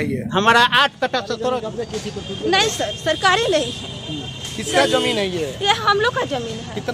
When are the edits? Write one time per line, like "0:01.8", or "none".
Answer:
0:01.7